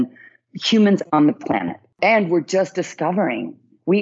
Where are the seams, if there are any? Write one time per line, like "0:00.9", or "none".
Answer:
0:02.0